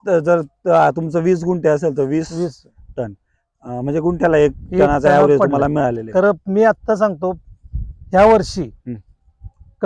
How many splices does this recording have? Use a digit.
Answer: 0